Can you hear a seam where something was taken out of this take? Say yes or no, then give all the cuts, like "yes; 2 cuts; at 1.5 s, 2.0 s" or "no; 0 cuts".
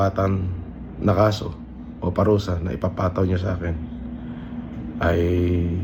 no; 0 cuts